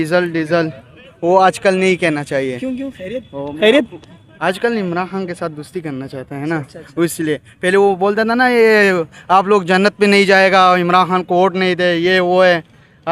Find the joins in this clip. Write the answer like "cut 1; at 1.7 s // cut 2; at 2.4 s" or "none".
none